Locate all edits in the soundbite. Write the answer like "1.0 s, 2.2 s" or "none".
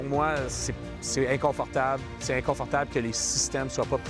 none

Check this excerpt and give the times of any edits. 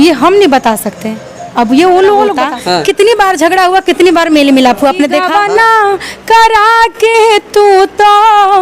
2.5 s, 5.3 s

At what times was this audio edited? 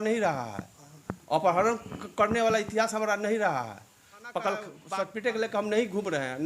4.8 s

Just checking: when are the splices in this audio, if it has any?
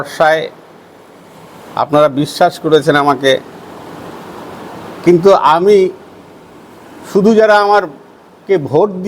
4.5 s

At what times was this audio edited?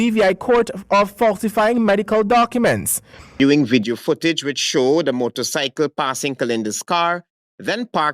3.3 s

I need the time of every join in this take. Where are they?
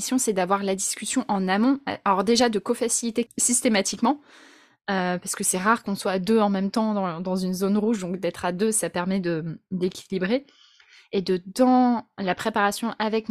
3.3 s

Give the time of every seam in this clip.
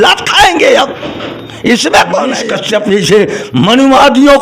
2.5 s

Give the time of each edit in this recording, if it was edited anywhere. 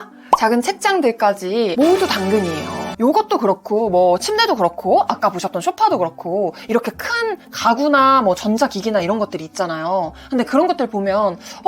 2.8 s

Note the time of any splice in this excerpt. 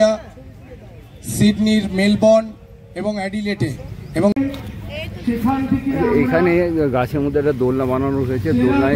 4.3 s

